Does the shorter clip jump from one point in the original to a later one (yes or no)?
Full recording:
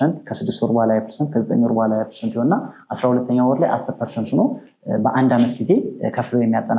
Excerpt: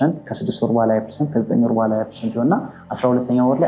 no